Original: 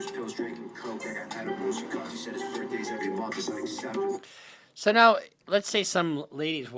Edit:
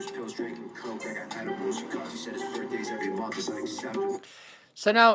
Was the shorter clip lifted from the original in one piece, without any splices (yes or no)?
yes